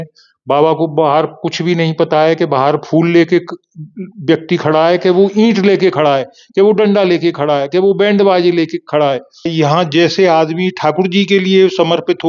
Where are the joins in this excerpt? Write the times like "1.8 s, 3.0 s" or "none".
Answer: 9.5 s